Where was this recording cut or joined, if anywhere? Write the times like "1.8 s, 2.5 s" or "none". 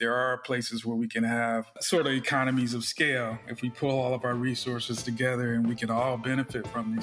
1.8 s